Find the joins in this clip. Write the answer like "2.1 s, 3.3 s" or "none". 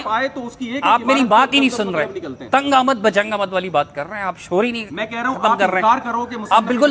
none